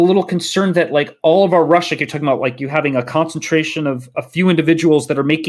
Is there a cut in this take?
no; 0 cuts

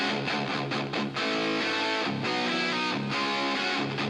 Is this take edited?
no; 0 cuts

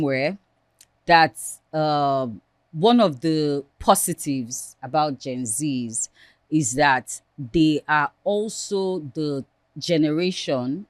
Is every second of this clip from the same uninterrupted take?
yes; 0 cuts

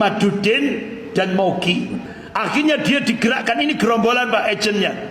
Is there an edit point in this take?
yes; 1 cut; at 2.2 s

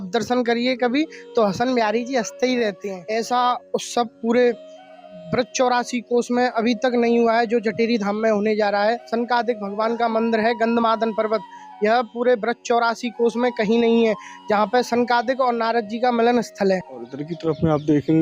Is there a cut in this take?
yes; 3 cuts; at 2.9 s, 9.0 s, 17.1 s

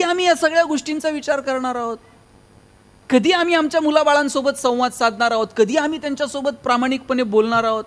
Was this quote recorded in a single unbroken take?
yes; 0 cuts

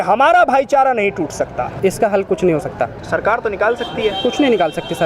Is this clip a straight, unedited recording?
no; 1 cut; at 1.8 s

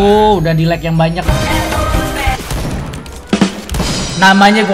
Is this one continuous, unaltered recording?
no; 1 cut; at 2.4 s

